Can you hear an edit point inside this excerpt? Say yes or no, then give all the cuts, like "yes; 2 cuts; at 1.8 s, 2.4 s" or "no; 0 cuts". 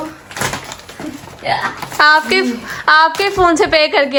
no; 0 cuts